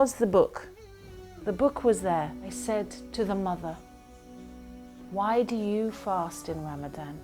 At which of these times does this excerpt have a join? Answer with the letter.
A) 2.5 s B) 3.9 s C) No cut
A